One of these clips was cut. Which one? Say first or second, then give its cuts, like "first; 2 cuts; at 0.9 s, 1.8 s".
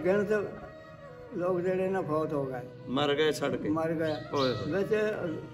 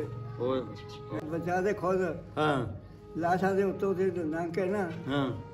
second; 1 cut; at 1.2 s